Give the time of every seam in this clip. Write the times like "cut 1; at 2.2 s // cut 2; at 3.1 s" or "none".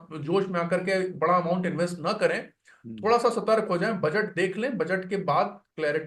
none

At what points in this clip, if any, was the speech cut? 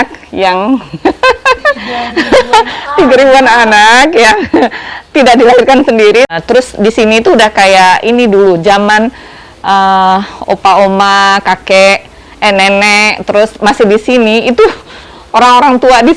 cut 1; at 6.3 s

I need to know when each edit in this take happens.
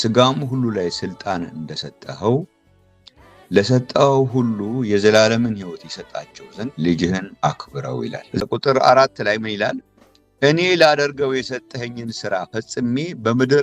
cut 1; at 8.4 s

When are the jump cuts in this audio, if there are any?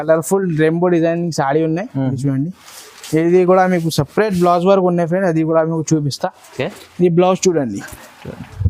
none

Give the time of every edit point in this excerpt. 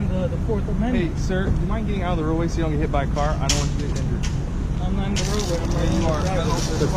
none

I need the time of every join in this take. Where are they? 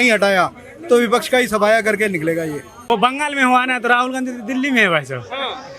cut 1; at 2.7 s

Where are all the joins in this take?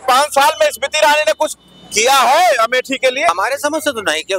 cut 1; at 3.3 s

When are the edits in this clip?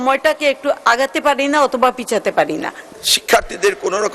cut 1; at 2.8 s

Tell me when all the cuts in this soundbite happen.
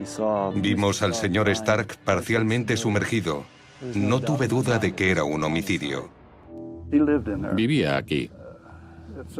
cut 1; at 7.9 s

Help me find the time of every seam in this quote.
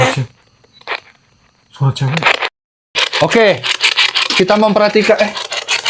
cut 1; at 3.0 s

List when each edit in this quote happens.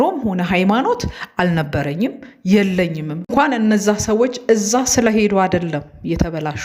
cut 1; at 3.3 s

